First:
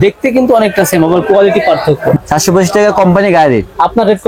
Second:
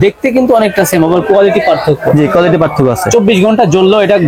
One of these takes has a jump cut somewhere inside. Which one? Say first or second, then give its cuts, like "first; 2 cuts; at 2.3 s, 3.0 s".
first; 1 cut; at 2.2 s